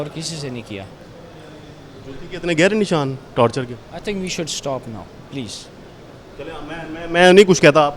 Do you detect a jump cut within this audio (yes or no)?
no